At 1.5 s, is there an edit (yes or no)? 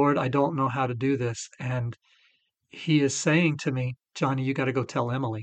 no